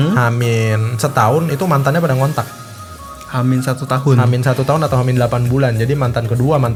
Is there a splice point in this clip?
no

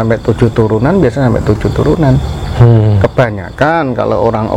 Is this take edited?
no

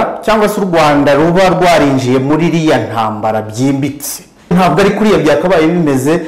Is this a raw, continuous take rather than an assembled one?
no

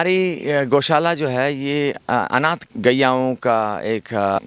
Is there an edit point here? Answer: yes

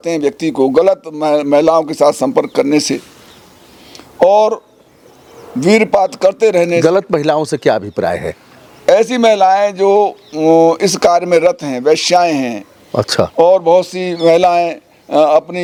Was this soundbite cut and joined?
no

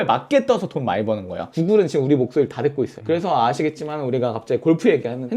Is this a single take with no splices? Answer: no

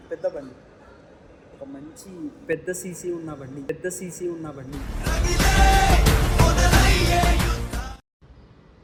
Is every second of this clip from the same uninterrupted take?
yes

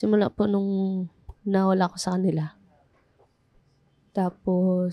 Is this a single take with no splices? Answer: yes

